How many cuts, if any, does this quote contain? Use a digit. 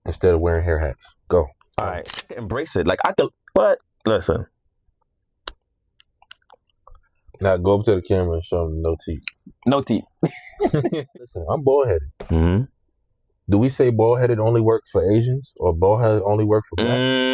2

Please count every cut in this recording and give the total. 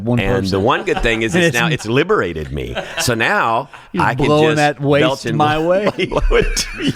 0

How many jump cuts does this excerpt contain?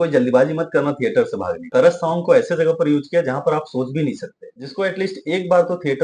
2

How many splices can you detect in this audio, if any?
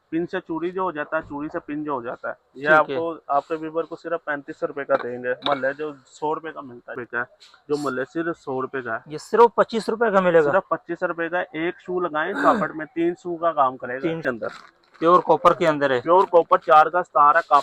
2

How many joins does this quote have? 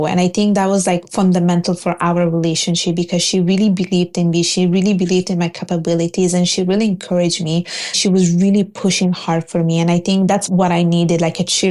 2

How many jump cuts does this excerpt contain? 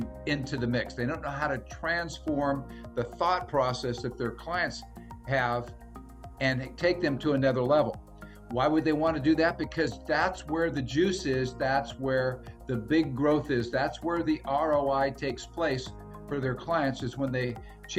0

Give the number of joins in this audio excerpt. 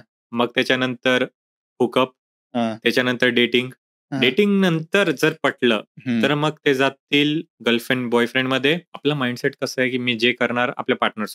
1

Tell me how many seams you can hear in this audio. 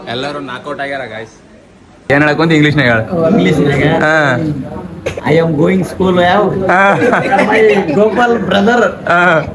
1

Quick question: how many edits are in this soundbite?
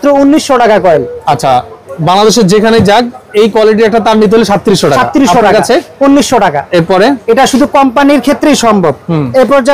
0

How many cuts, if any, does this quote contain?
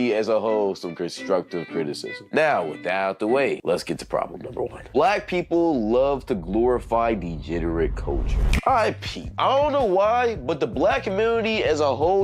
3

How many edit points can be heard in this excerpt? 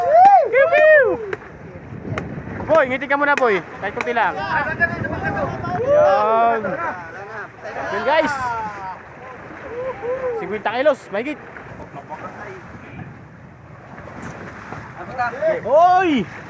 1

